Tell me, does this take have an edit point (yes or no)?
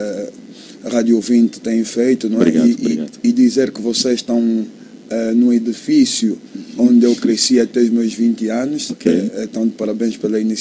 no